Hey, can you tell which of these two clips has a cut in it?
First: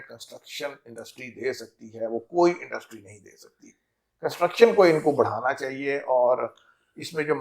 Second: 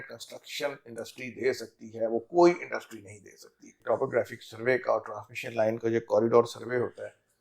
second; 1 cut; at 3.7 s

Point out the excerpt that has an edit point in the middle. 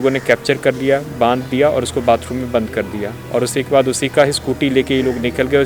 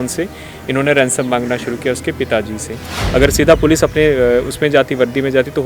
second; 1 cut; at 2.9 s

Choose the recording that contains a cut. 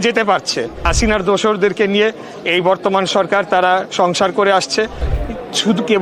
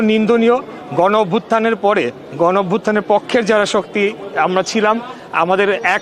first; 2 cuts; at 0.9 s, 5.0 s

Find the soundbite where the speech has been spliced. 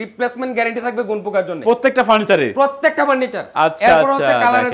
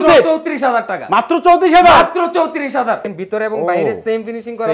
second; 1 cut; at 3.1 s

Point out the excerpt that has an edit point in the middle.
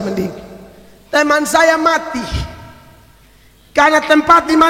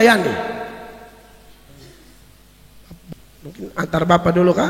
second; 1 cut; at 3.1 s

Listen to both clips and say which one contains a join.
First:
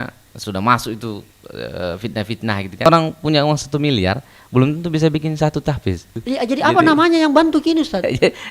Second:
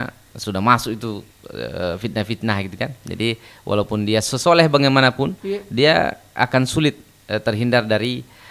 first; 2 cuts; at 2.9 s, 6.1 s

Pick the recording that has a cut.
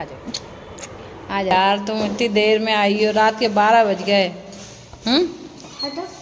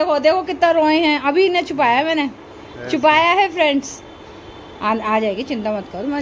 first; 1 cut; at 1.5 s

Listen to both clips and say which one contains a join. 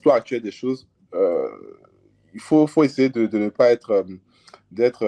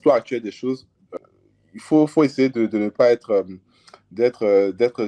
second; 1 cut; at 1.0 s

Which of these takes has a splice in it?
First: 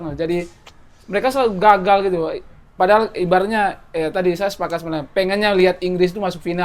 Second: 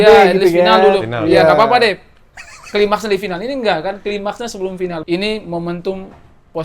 second; 1 cut; at 5.0 s

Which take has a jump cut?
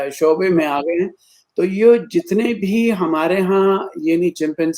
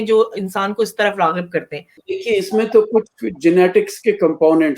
second; 1 cut; at 1.9 s

